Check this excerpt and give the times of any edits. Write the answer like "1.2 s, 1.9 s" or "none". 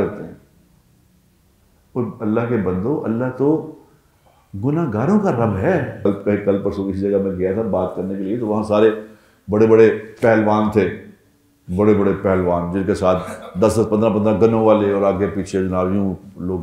6.1 s